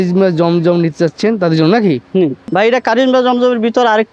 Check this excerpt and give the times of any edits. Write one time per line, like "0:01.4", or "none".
0:02.4